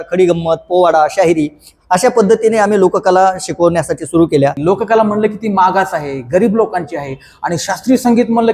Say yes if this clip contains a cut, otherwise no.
yes